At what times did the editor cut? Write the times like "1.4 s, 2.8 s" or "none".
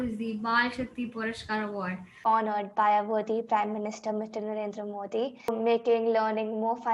2.2 s, 5.5 s